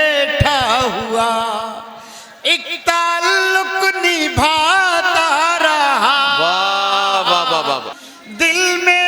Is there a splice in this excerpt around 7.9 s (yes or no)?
yes